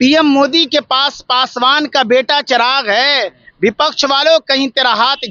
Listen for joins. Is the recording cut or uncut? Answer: uncut